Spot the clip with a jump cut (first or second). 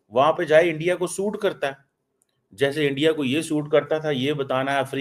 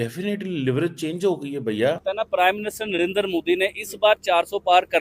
second